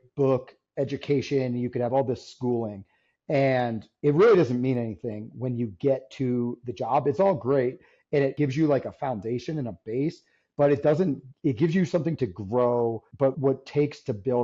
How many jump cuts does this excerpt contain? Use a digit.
2